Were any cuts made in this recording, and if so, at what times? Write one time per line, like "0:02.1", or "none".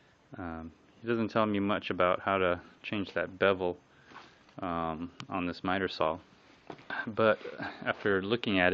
none